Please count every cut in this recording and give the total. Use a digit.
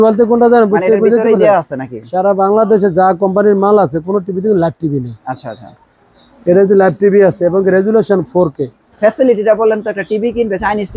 1